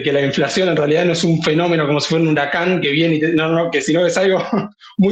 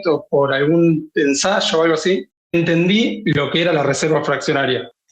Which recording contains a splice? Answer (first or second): second